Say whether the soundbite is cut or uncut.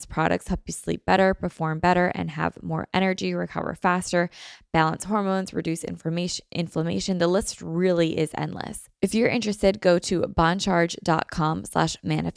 cut